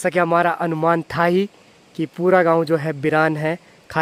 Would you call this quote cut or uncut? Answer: uncut